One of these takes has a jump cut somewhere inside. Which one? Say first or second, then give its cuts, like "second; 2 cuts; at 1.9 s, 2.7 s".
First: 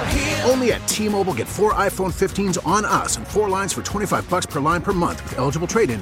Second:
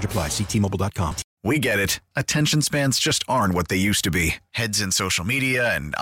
second; 1 cut; at 1.3 s